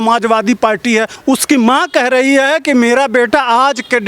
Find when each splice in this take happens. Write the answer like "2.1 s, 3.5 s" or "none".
1.1 s